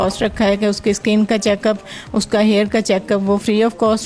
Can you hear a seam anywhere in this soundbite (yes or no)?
no